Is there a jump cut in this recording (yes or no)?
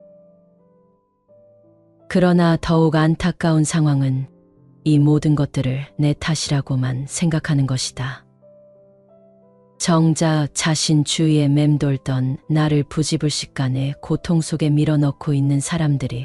no